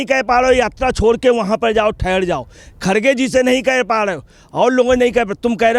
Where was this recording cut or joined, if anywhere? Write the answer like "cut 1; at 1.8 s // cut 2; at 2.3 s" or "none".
none